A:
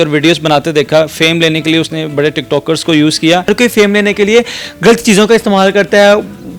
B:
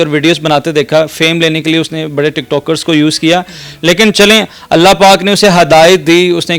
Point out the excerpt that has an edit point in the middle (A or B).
A